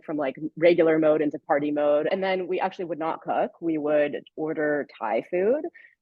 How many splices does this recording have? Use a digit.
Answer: 1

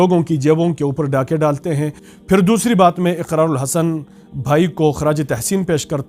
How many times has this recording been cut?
1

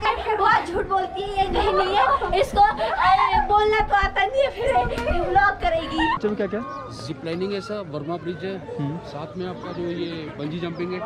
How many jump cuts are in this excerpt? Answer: 1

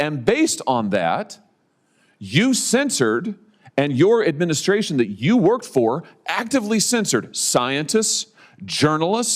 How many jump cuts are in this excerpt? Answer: 0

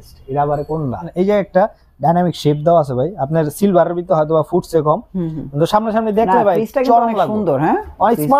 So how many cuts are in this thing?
1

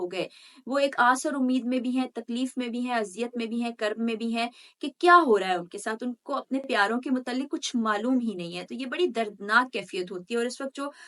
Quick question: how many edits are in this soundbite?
0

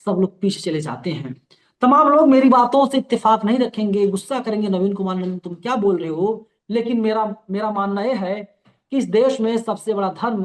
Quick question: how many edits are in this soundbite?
0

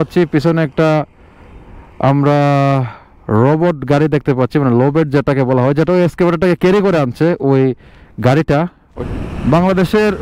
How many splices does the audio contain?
1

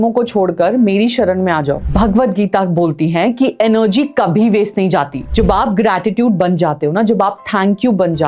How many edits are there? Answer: 2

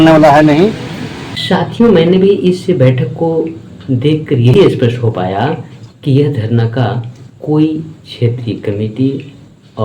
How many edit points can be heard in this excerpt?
1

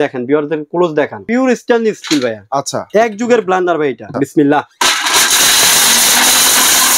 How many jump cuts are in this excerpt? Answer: 2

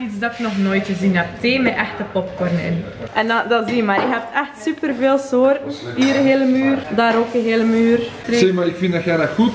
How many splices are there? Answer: 2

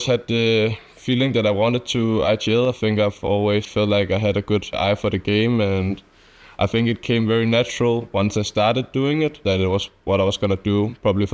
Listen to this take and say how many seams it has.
2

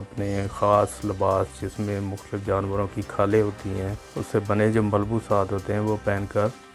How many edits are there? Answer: 0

